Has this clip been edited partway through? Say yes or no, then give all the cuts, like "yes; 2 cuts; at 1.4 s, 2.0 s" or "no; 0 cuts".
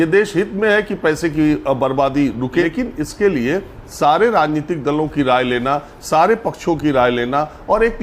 yes; 1 cut; at 2.6 s